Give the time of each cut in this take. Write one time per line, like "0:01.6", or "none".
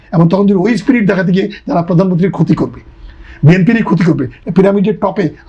0:04.4